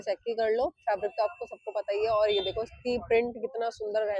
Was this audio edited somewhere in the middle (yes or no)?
no